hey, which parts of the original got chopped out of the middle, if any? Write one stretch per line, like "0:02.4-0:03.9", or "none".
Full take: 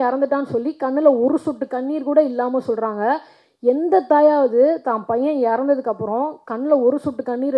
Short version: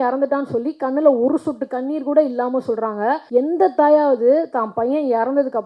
0:03.2-0:03.6